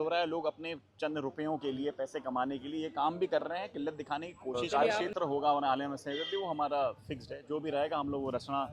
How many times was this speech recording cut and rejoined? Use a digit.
1